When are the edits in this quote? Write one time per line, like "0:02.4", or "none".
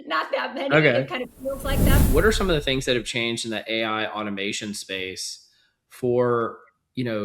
0:02.0

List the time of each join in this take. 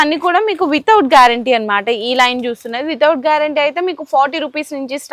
none

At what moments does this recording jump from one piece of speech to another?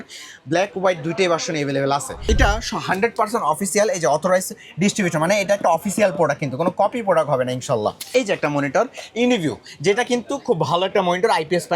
0:02.2
0:08.0

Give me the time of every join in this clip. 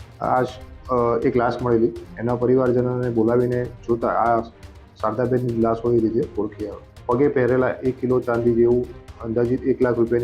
0:02.1
0:06.9

